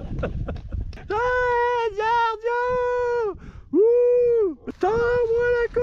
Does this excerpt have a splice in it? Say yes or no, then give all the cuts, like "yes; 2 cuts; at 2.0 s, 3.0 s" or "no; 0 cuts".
yes; 2 cuts; at 1.0 s, 4.7 s